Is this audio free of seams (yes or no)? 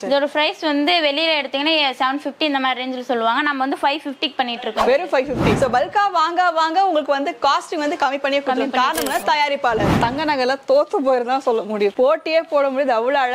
no